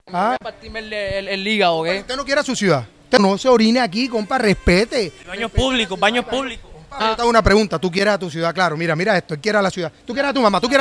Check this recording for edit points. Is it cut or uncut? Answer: cut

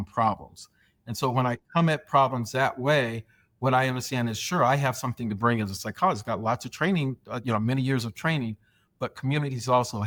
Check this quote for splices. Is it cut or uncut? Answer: uncut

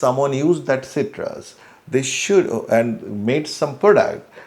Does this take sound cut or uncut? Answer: uncut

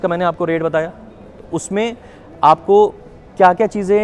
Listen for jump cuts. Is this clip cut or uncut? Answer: uncut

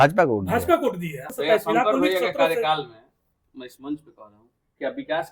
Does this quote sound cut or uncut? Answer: cut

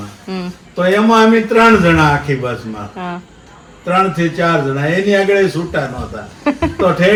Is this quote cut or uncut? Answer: uncut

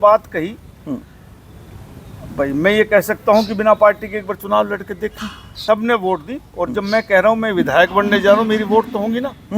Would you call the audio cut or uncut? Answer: cut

